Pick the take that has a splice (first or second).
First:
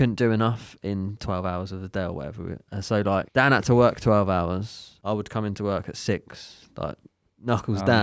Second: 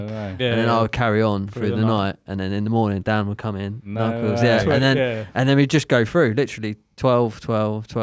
first